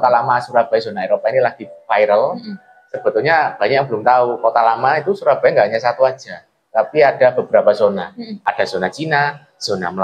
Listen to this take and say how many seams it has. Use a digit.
1